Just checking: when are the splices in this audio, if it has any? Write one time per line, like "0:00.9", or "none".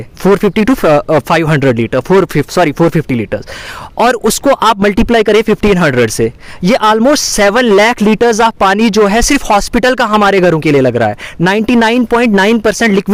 none